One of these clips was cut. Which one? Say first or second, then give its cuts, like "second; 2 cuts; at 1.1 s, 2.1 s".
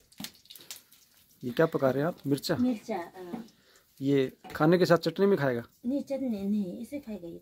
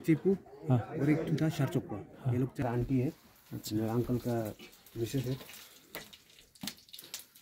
second; 1 cut; at 2.6 s